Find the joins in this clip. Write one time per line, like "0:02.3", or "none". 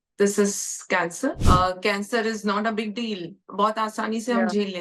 0:01.4